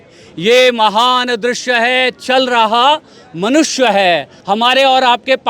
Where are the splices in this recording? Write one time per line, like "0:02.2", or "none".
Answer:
0:04.3